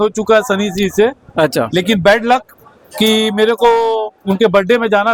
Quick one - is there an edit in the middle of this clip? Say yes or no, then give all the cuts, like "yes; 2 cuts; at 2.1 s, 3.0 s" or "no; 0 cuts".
no; 0 cuts